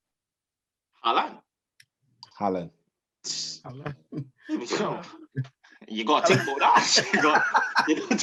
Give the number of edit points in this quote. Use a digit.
0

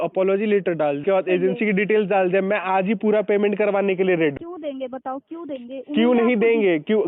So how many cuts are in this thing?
2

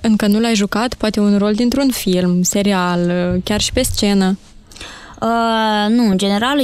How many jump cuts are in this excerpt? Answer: 0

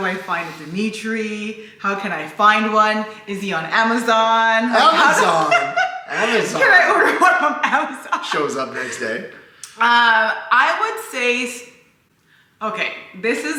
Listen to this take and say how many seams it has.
0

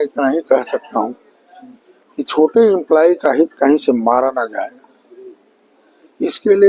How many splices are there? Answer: 0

